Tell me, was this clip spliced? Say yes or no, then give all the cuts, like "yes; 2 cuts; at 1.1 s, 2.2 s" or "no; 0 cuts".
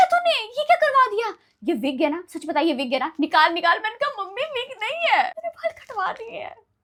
no; 0 cuts